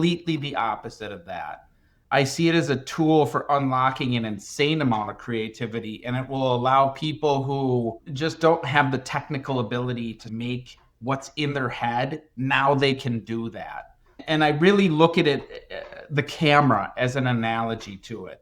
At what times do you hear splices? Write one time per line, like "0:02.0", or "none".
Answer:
0:08.0
0:10.3